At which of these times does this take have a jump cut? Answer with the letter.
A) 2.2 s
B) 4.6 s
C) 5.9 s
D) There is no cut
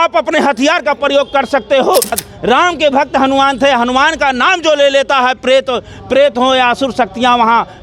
A